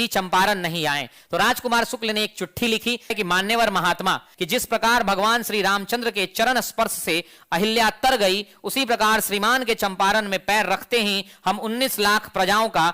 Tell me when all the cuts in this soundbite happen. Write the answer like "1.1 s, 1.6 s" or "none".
3.1 s, 4.3 s